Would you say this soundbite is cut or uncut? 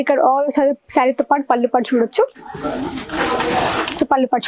uncut